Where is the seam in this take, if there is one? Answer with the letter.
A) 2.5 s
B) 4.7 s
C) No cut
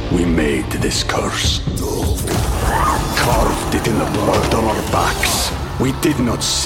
C